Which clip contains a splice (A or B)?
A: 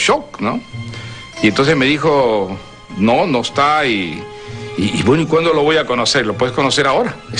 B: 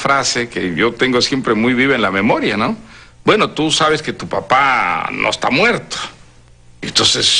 B